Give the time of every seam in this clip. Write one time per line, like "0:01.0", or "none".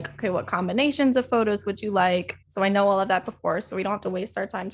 0:02.4